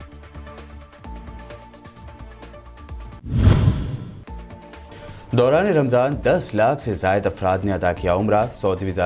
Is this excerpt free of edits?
no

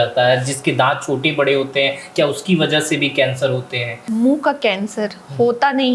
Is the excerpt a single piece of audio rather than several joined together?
no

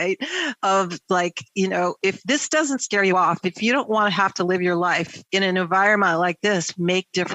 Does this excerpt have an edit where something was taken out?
yes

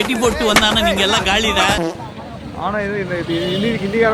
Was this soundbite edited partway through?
no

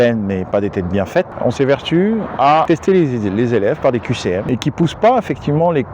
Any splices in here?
yes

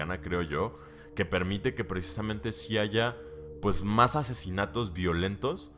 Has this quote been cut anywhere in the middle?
no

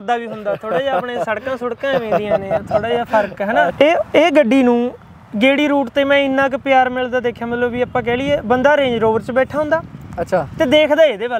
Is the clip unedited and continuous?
no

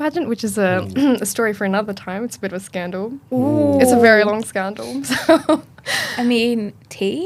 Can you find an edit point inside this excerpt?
no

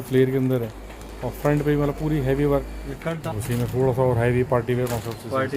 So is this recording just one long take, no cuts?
no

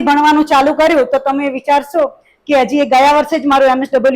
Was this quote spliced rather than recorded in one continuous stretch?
no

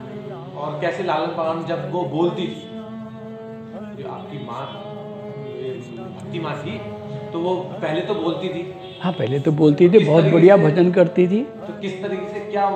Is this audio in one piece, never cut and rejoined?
yes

